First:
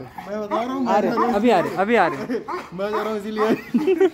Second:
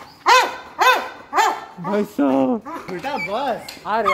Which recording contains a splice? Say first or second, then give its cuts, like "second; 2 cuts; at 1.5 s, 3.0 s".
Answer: second; 1 cut; at 2.9 s